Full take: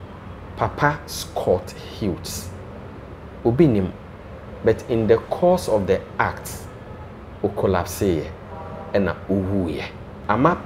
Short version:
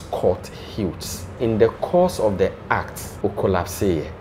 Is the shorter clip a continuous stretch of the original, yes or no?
no